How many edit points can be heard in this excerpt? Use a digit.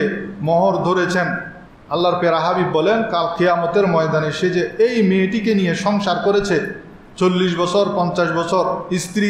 0